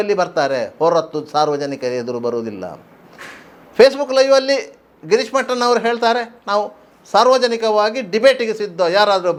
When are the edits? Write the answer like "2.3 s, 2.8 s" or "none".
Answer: none